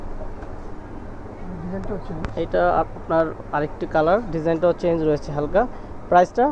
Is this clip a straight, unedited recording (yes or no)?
yes